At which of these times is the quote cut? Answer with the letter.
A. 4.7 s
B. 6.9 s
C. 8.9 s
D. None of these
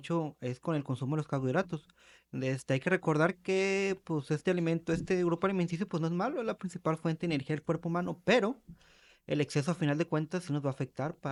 D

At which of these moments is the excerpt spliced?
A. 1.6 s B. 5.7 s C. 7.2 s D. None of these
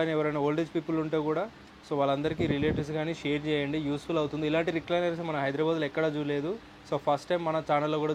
D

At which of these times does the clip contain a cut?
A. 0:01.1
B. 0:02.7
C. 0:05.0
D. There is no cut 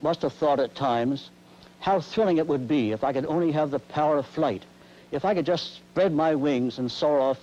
D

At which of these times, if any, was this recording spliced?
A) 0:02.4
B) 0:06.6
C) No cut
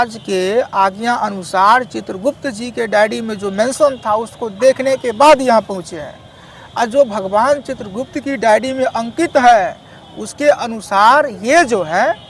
C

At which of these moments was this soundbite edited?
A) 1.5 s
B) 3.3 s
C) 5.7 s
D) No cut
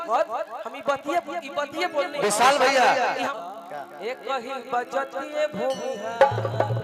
B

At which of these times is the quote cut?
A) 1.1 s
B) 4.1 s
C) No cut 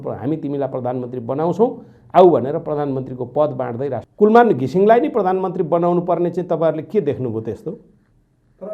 B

